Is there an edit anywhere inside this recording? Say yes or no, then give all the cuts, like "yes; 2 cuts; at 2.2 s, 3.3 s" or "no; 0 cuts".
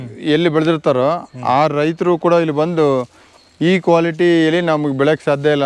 no; 0 cuts